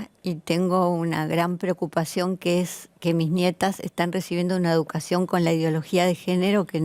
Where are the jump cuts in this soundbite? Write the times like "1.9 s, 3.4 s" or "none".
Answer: none